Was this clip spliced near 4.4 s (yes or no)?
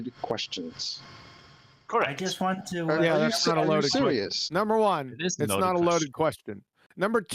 yes